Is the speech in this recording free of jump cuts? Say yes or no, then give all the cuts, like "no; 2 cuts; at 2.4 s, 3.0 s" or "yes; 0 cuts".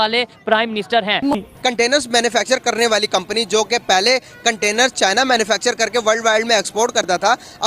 no; 1 cut; at 1.3 s